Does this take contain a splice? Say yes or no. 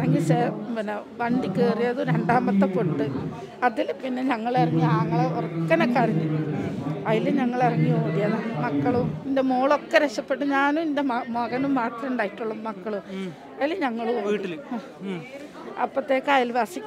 no